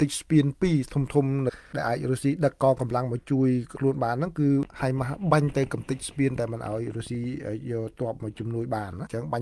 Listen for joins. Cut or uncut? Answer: uncut